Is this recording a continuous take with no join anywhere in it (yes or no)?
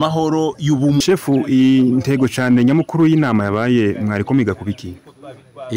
no